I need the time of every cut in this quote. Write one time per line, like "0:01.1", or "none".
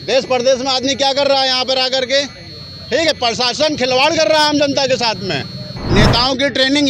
0:05.7